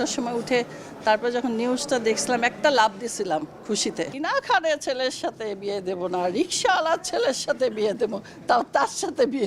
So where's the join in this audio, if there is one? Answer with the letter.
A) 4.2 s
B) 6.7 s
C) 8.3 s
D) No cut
A